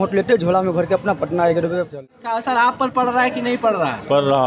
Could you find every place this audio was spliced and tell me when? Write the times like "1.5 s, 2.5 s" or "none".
2.0 s